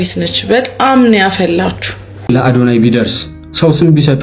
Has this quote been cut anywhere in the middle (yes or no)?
yes